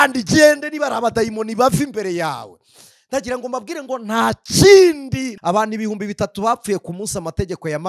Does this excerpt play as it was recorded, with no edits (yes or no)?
no